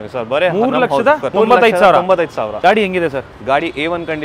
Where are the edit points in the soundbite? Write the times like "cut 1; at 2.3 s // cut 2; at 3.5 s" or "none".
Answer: cut 1; at 1.3 s // cut 2; at 2.5 s